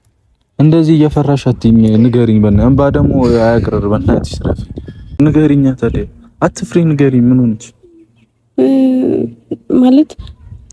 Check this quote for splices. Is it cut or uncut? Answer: cut